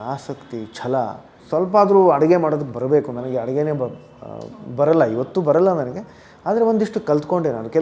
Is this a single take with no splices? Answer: no; 1 cut; at 1.4 s

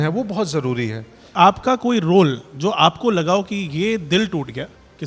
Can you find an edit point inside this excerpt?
yes; 1 cut; at 1.2 s

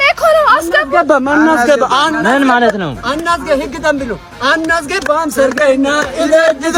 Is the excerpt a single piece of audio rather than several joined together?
yes; 0 cuts

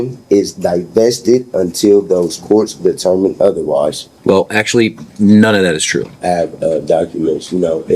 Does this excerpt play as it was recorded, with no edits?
no; 2 cuts; at 4.1 s, 6.1 s

